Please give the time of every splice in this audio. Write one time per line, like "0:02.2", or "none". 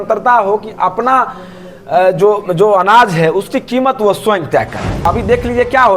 0:05.1

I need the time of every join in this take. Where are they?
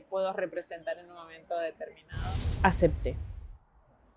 0:02.3

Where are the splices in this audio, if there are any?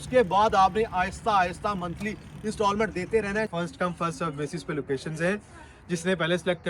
0:03.5

